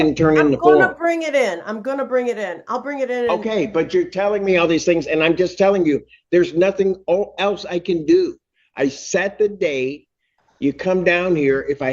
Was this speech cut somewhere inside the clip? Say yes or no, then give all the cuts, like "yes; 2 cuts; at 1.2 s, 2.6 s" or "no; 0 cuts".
no; 0 cuts